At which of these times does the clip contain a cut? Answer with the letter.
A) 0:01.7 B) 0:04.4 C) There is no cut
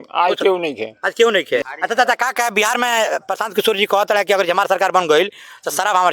A